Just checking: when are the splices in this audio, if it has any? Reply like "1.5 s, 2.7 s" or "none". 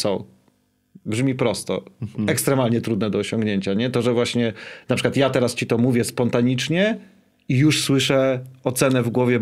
none